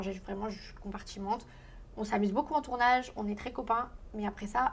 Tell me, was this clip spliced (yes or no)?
no